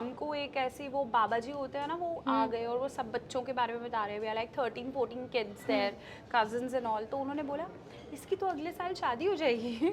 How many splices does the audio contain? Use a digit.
0